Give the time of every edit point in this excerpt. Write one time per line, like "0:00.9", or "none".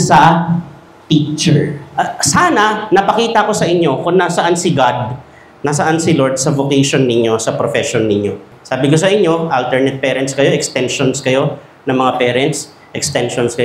0:01.8

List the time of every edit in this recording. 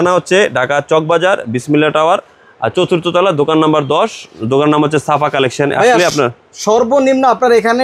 none

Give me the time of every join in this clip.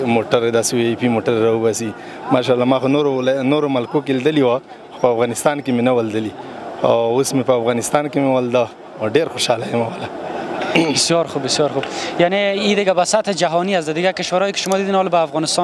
none

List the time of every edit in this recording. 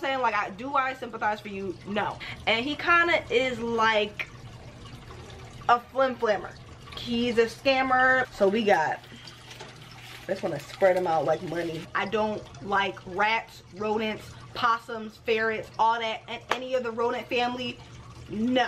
0:02.2
0:08.3
0:11.7

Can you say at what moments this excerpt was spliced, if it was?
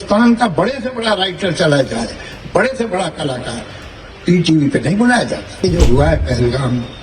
0:05.6

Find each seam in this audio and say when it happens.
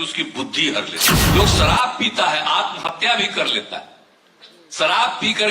0:01.2

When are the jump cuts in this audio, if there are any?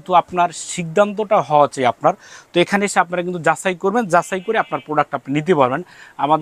none

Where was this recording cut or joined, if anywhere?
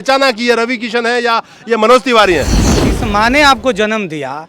0:02.9

